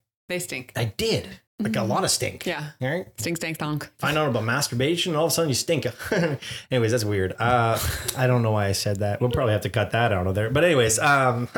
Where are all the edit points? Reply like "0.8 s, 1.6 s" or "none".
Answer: 1.4 s